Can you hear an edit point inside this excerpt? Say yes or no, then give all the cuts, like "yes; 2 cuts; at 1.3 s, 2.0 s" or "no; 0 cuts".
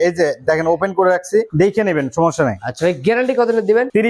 no; 0 cuts